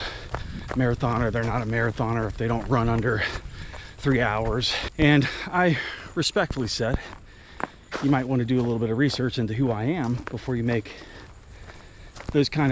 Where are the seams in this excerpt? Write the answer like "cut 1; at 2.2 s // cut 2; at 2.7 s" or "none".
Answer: cut 1; at 4.8 s